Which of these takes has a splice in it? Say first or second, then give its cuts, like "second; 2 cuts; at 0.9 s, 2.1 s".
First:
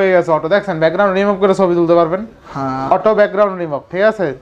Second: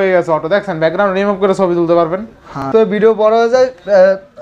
second; 1 cut; at 2.7 s